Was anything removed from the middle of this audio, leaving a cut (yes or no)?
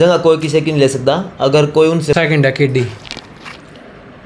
yes